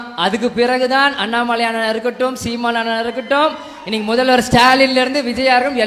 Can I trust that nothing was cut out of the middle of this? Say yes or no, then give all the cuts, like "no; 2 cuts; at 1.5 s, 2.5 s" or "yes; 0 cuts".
yes; 0 cuts